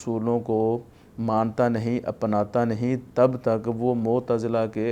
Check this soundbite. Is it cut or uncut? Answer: uncut